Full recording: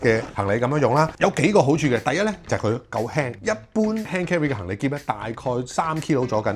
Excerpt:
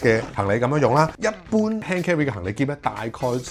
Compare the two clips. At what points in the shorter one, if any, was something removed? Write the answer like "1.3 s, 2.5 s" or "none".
1.1 s